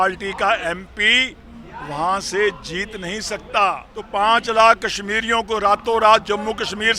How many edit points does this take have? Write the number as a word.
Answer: one